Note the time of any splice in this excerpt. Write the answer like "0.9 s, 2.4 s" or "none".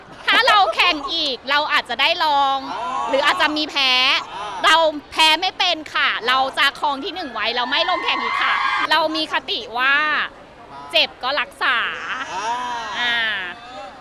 8.8 s